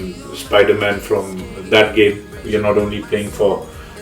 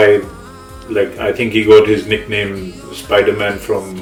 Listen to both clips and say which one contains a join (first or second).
first